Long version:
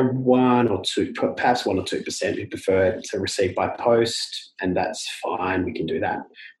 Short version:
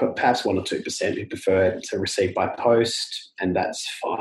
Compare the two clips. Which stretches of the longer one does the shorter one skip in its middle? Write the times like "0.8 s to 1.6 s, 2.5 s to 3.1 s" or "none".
none